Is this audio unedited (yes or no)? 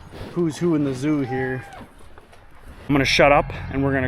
no